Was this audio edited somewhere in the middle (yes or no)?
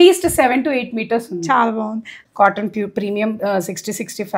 yes